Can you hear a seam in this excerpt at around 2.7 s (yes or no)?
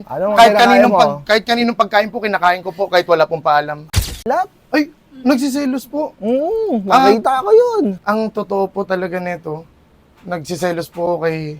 no